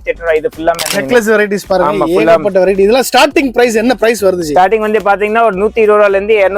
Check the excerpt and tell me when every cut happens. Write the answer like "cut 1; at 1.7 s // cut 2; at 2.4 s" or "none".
cut 1; at 0.9 s